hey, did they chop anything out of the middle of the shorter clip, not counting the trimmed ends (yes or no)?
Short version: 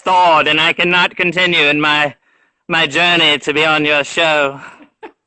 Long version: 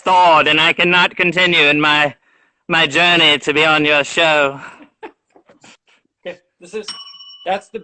no